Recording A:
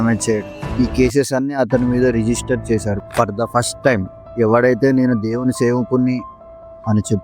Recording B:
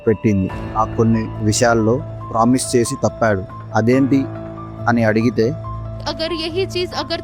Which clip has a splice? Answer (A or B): A